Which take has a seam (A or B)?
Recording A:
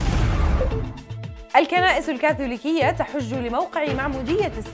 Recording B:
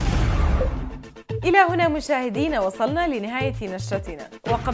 A